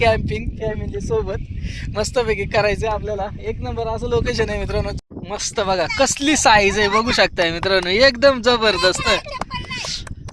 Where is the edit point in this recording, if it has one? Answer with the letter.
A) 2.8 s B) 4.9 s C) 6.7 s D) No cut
B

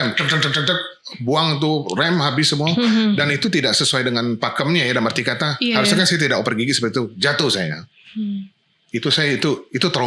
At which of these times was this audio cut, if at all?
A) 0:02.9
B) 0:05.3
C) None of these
C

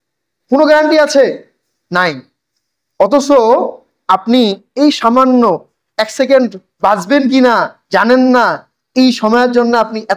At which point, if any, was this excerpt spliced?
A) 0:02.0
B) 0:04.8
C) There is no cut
C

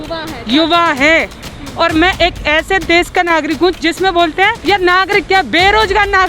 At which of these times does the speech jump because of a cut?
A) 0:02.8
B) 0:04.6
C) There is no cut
B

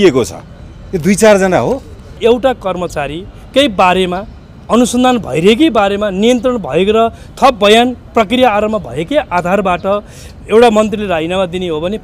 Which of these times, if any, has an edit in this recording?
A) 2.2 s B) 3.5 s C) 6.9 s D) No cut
A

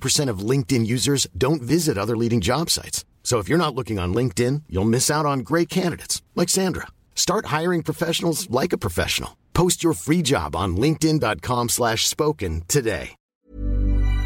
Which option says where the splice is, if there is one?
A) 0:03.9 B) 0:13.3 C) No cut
B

